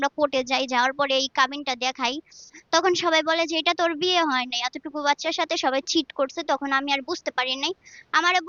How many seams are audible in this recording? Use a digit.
0